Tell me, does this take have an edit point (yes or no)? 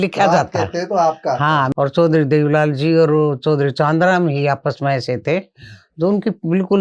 yes